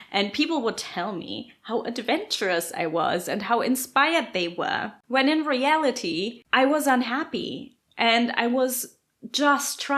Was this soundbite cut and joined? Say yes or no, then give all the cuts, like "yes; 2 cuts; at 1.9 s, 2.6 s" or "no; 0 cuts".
yes; 2 cuts; at 4.9 s, 6.4 s